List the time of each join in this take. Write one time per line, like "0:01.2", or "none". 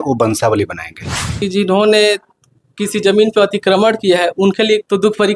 0:01.4